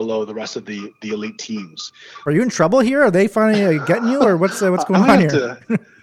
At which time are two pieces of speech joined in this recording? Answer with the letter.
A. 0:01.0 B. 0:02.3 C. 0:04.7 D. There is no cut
B